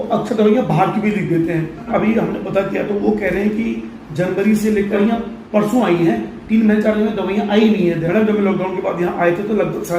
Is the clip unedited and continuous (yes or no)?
no